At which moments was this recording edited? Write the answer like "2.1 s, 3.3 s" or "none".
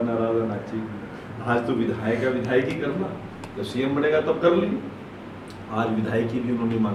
none